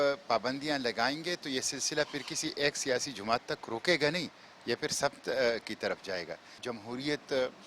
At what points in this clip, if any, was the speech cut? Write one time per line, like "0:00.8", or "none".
0:06.5